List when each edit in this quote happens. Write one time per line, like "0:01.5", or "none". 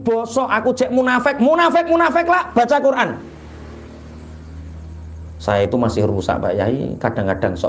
none